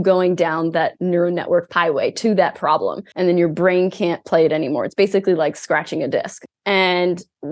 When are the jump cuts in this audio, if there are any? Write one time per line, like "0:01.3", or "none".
0:01.7
0:03.1
0:06.4